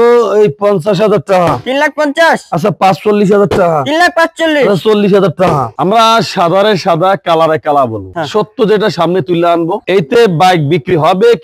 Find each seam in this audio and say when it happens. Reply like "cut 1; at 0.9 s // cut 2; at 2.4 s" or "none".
cut 1; at 5.7 s // cut 2; at 8.0 s